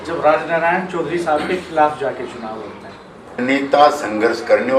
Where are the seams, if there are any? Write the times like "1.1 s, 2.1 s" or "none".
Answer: 3.4 s

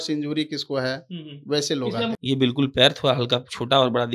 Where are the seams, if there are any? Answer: 2.2 s

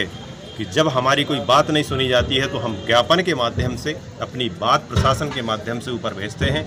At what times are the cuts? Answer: none

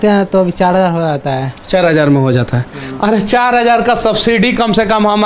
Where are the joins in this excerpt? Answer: none

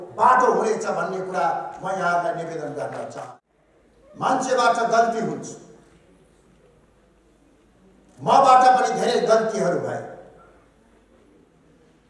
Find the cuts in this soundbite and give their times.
3.1 s

